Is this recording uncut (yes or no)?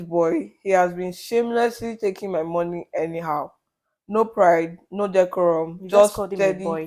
yes